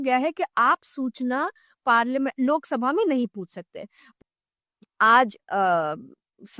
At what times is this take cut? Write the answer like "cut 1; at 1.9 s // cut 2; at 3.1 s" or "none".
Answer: cut 1; at 4.0 s